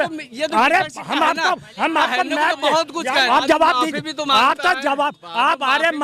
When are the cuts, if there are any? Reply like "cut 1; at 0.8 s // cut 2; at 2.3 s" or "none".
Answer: cut 1; at 3.3 s